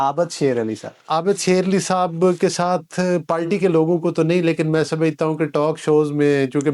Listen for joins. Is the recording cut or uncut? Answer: cut